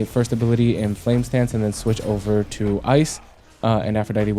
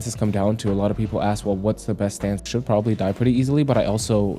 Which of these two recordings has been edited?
second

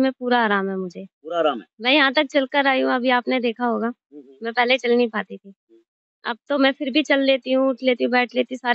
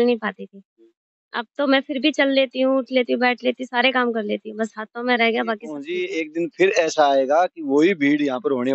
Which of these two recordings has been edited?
second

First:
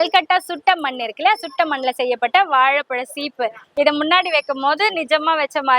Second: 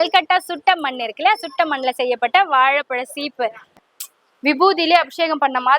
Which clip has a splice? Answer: second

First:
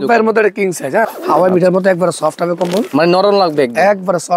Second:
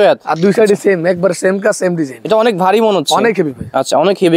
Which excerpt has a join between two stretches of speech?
first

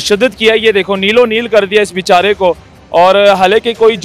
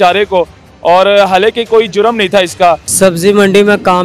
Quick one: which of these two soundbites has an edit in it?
second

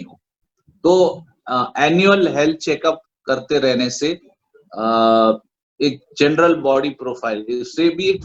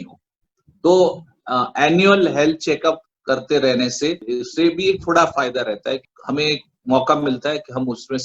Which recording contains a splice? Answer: second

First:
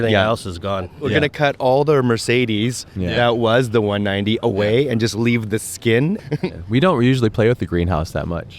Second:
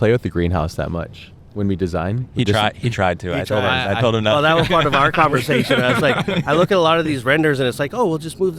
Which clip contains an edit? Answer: first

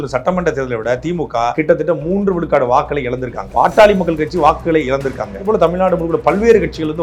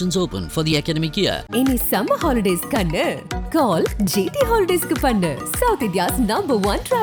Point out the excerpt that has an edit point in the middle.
first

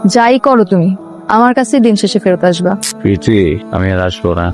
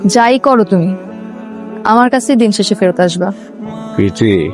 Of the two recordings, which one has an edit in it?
first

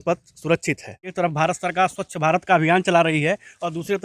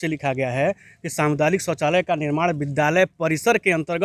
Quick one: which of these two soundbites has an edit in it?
first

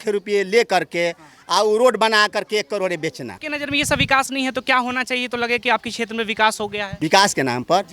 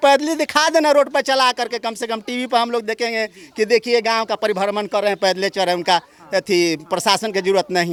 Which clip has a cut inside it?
first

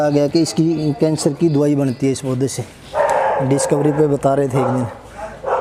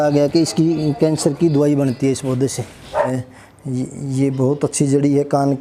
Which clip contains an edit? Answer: second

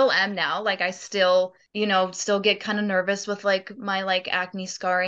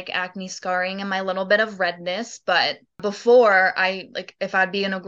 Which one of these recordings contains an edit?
first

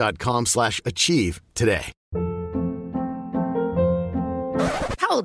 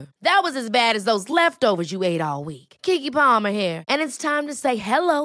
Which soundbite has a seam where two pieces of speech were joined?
first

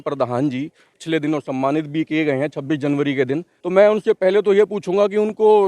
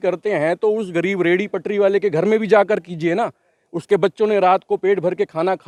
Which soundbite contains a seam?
first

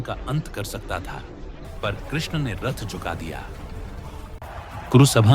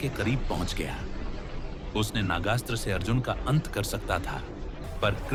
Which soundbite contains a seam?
first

